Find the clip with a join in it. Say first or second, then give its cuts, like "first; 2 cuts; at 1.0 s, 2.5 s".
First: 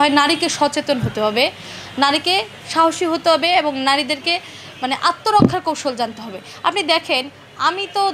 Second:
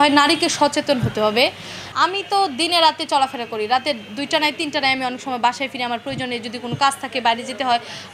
second; 1 cut; at 1.8 s